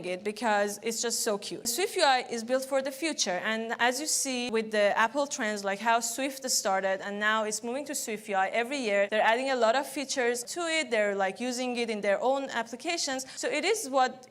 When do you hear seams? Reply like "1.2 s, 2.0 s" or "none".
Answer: 1.7 s, 4.5 s, 9.1 s, 10.5 s, 13.3 s